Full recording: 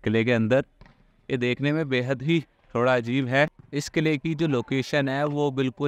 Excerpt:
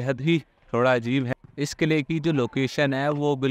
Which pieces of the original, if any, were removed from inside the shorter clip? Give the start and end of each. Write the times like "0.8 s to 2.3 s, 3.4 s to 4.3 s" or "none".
3.3 s to 3.5 s

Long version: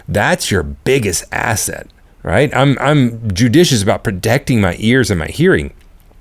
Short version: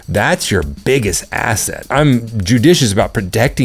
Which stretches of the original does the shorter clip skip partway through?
1.9 s to 2.8 s

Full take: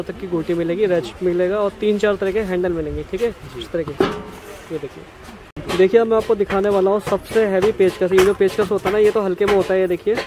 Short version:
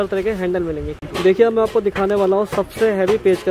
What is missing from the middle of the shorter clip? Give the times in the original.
3.0 s to 5.5 s

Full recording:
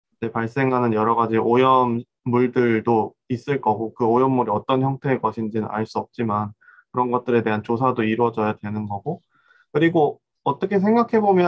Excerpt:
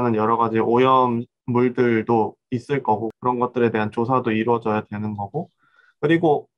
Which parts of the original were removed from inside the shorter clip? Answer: 3.9 s to 6.8 s

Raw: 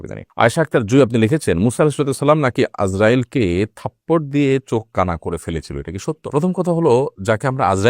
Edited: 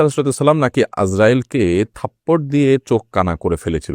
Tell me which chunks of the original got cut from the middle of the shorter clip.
none

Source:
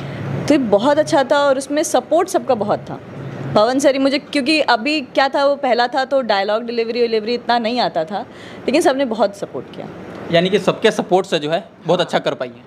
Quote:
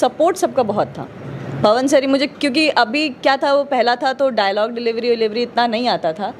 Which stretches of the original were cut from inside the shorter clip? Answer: none

